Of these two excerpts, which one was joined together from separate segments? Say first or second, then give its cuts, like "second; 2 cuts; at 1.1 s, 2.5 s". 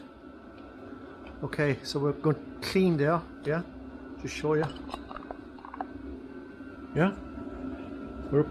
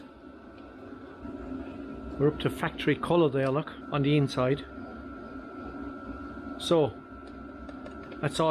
second; 2 cuts; at 1.2 s, 3.8 s